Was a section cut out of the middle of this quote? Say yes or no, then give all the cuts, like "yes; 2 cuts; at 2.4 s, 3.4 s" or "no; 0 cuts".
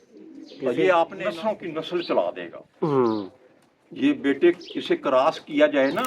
yes; 1 cut; at 1.2 s